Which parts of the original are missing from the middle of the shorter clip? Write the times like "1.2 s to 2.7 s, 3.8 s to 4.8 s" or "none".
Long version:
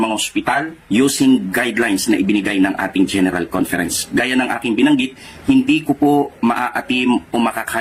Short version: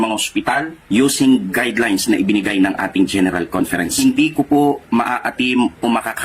3.9 s to 5.4 s